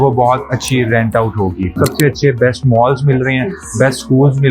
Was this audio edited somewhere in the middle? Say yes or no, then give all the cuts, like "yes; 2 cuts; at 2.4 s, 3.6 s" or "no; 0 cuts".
yes; 1 cut; at 1.8 s